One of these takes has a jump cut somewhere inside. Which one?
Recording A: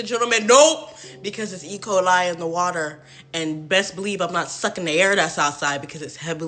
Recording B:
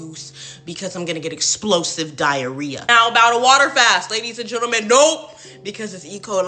B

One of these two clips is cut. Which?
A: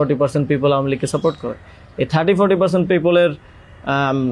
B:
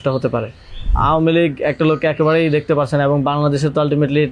B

